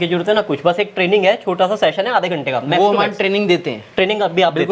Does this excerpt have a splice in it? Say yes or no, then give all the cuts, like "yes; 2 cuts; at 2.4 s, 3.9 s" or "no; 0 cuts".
no; 0 cuts